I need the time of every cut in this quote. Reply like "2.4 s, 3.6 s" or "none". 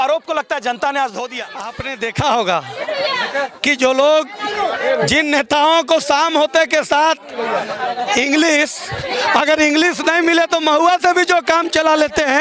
1.8 s